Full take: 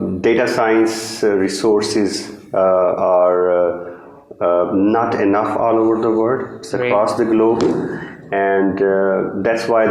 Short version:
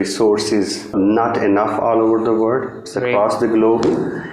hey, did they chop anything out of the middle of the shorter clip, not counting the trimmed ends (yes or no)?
yes